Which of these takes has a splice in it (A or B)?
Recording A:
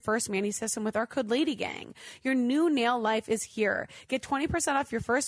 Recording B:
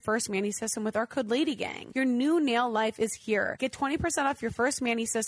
B